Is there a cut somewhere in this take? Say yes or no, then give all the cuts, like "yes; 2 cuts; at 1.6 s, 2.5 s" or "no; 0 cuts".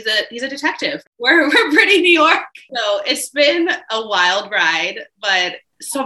yes; 2 cuts; at 1.0 s, 2.7 s